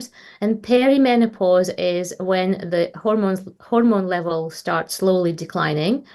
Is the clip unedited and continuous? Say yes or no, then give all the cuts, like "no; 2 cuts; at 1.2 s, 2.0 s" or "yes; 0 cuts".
yes; 0 cuts